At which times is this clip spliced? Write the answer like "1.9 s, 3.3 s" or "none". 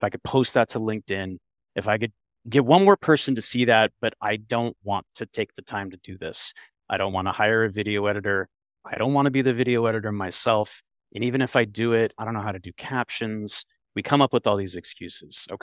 none